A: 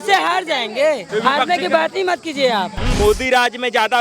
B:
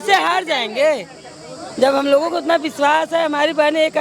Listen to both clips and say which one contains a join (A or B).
A